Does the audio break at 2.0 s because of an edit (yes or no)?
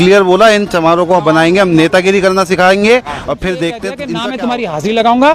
no